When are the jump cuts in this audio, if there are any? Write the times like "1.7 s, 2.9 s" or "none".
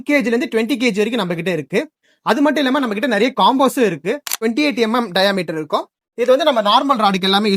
4.4 s